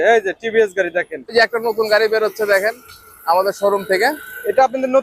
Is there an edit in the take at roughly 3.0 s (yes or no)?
no